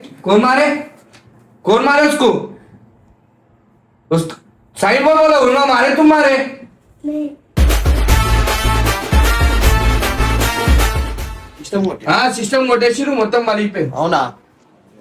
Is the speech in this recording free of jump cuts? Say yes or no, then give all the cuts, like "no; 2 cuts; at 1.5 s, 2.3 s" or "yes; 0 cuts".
no; 1 cut; at 11.1 s